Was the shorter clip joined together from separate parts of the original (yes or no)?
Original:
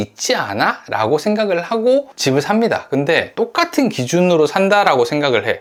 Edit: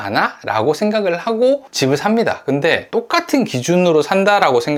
no